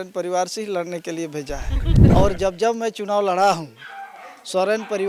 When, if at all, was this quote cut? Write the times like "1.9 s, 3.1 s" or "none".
2.0 s